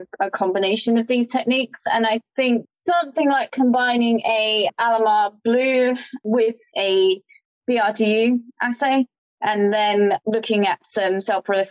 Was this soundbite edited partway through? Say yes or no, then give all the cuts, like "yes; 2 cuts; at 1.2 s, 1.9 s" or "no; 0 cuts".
yes; 2 cuts; at 6.1 s, 10.2 s